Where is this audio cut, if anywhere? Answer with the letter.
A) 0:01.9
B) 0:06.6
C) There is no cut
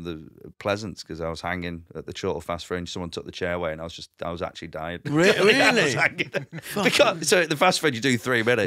C